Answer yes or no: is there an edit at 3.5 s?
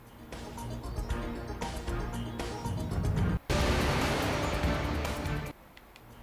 yes